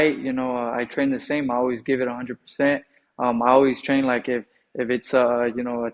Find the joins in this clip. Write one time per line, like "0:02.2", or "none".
none